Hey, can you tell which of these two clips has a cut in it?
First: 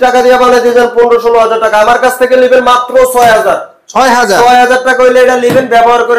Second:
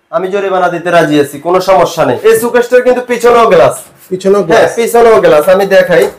second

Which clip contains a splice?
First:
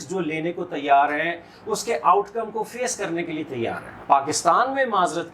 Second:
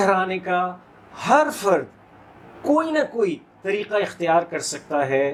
first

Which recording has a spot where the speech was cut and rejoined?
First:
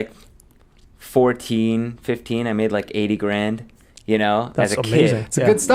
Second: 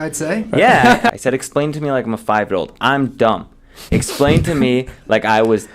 second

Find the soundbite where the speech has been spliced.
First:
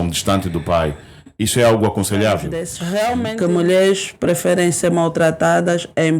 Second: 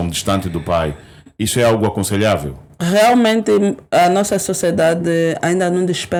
first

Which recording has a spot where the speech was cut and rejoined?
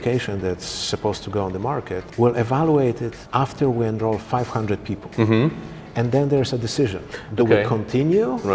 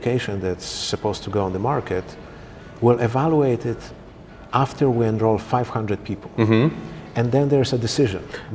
first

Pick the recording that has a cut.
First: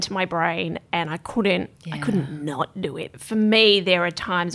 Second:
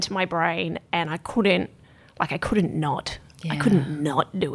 first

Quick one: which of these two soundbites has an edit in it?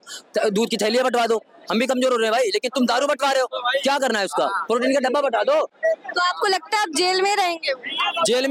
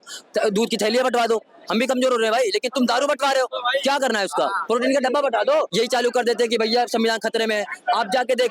second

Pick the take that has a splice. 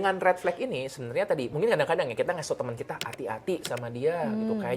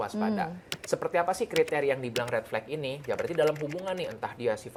first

